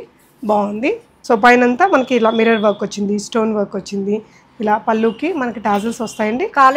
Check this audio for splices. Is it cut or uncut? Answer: cut